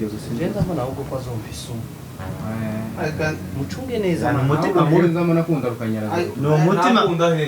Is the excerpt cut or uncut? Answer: uncut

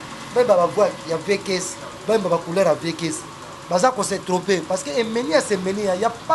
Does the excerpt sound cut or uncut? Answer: uncut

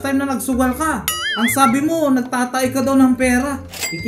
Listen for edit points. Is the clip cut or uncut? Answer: uncut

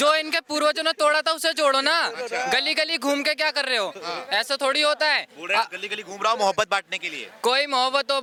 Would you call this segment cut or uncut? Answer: uncut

